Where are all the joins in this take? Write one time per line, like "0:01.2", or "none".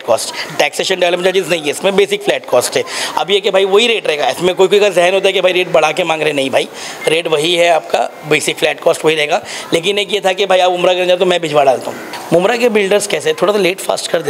0:12.1